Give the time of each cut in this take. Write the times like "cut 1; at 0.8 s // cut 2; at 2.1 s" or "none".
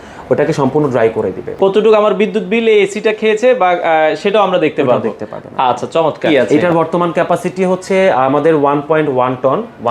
cut 1; at 1.5 s // cut 2; at 6.5 s